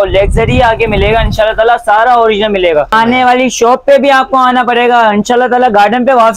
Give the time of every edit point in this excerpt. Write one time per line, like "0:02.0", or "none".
0:02.9